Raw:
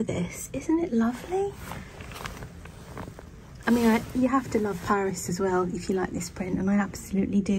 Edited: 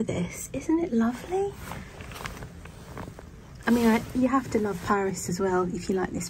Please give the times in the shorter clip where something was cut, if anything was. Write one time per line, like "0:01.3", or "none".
none